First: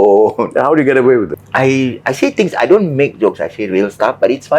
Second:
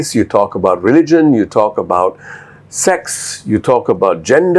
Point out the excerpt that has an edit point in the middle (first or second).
first